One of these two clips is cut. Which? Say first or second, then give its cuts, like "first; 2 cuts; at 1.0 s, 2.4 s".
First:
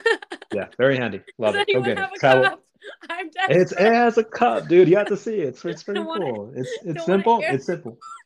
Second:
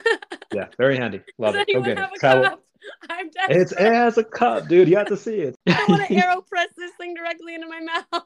second; 1 cut; at 5.6 s